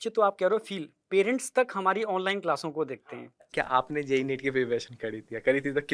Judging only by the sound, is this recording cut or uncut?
cut